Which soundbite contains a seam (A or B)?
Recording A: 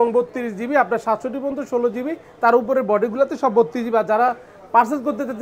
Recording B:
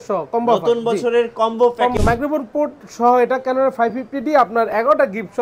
B